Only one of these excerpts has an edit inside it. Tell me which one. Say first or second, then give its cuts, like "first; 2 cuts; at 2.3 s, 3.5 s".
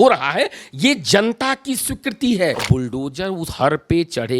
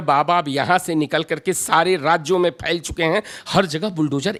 first; 1 cut; at 2.6 s